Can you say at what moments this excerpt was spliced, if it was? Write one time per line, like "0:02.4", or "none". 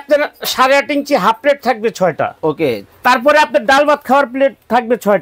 0:02.9